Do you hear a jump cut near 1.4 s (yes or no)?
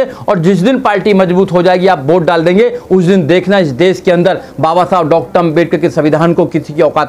no